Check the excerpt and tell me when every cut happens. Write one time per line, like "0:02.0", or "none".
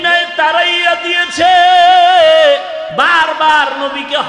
0:03.2

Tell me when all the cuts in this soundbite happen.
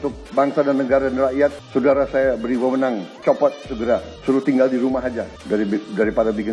0:01.6
0:03.1
0:04.1
0:05.3

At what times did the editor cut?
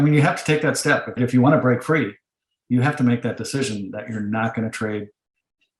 0:01.2

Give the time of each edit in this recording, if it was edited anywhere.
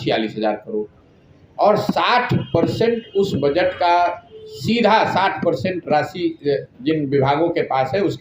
none

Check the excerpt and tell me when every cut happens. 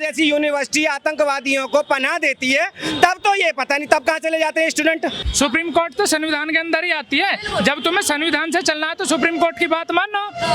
0:05.2

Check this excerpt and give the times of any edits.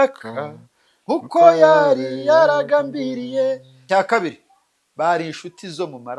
0:03.7

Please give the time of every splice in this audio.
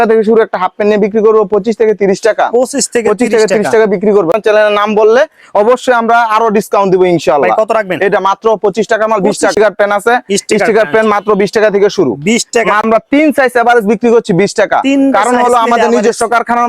0:04.3
0:09.5
0:12.8

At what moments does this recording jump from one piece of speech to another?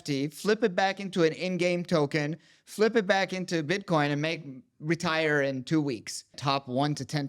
0:06.4

